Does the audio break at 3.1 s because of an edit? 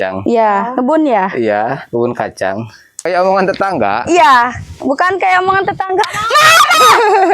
yes; 1 cut; at 3.1 s

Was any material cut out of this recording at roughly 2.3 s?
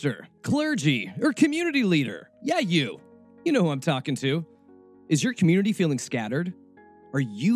yes; 1 cut; at 2.3 s

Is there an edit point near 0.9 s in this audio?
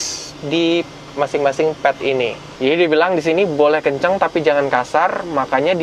no; 1 cut; at 2.4 s

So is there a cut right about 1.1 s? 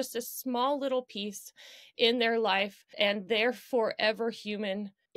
no; 1 cut; at 2.9 s

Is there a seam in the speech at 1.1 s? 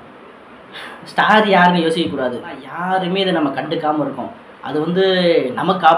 no; 1 cut; at 2.7 s

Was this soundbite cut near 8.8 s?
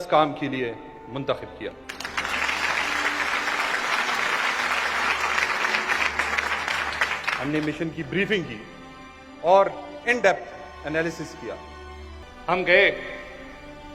no; 1 cut; at 12.2 s

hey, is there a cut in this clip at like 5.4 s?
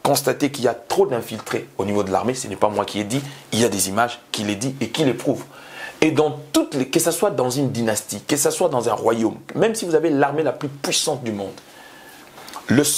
no; 0 cuts

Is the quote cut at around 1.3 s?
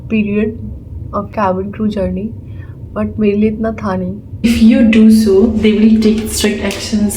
yes; 2 cuts; at 1.3 s, 4.5 s

